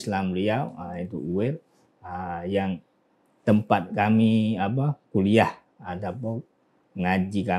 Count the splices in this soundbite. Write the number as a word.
zero